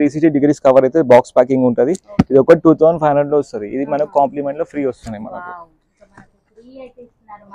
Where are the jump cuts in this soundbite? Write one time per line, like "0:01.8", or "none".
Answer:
none